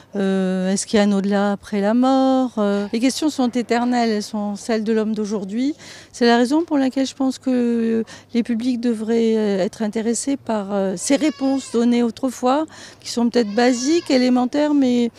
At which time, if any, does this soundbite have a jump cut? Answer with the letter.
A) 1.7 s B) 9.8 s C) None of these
A